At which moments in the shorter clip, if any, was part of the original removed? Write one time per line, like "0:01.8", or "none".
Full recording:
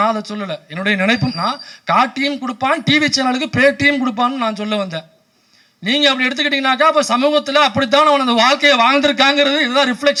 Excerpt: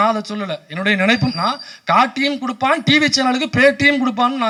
none